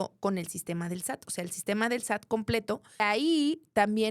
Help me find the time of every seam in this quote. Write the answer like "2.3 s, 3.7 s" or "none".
3.0 s

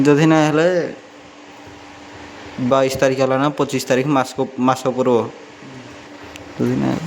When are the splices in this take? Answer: none

